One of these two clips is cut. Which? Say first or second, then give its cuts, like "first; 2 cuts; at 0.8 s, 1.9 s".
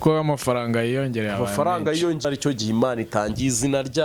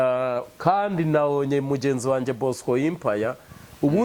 first; 1 cut; at 2.2 s